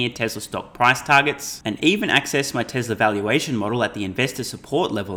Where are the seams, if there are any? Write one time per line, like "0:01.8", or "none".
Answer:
none

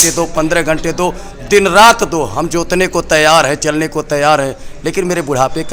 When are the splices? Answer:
none

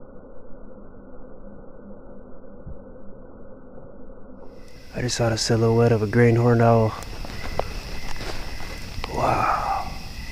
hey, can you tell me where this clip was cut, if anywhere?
0:04.7

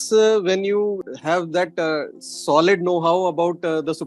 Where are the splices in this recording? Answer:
0:01.0

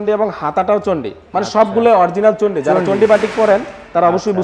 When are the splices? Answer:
none

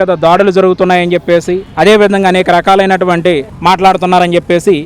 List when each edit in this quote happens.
0:03.5

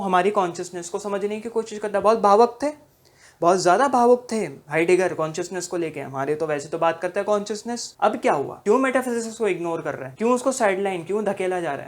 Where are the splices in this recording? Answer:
0:07.8
0:08.5
0:10.0

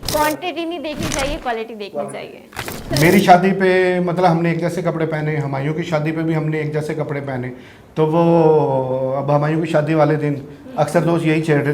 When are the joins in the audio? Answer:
0:02.9

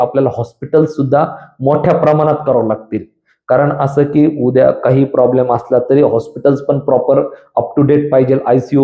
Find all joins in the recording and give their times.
none

